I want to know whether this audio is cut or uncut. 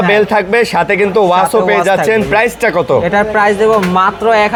uncut